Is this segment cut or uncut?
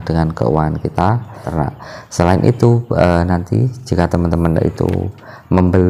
cut